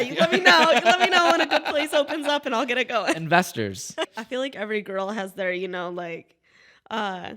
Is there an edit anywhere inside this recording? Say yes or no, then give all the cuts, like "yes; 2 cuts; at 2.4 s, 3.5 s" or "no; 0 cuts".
yes; 1 cut; at 4.1 s